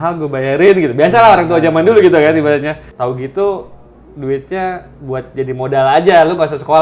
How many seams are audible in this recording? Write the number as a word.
one